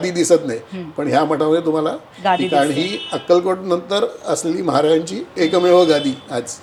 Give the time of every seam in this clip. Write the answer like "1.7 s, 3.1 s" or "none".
none